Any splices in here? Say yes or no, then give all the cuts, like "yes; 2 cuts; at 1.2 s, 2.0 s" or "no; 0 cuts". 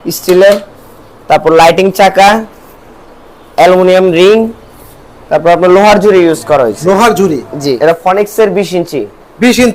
yes; 1 cut; at 7.8 s